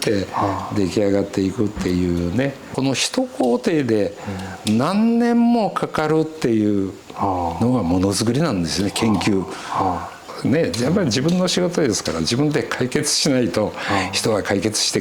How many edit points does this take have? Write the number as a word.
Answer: two